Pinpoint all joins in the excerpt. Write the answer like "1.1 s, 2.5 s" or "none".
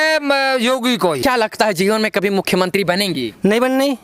1.2 s